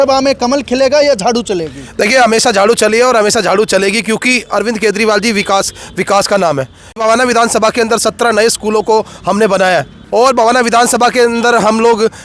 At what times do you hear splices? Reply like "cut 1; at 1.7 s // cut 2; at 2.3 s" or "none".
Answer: cut 1; at 7.0 s // cut 2; at 10.0 s